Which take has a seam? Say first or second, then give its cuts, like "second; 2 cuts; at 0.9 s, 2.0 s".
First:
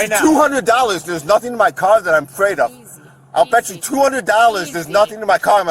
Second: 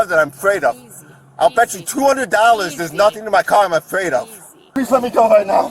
second; 1 cut; at 4.7 s